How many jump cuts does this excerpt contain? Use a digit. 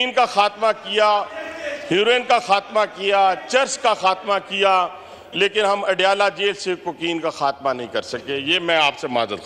0